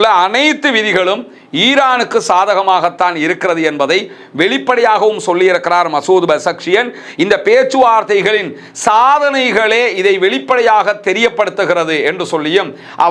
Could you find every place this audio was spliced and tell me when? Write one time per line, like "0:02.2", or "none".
none